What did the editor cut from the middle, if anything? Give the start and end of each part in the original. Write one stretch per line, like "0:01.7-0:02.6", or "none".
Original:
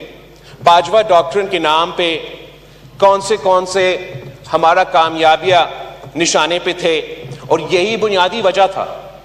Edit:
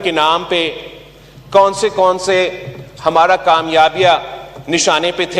none